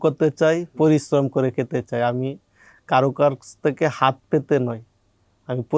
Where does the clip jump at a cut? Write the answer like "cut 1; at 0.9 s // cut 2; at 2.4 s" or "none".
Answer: none